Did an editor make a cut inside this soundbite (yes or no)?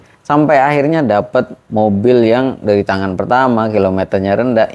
no